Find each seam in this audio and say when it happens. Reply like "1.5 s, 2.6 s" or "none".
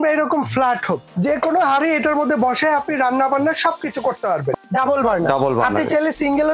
1.1 s, 4.5 s